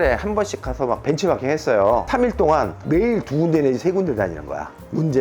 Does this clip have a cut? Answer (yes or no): yes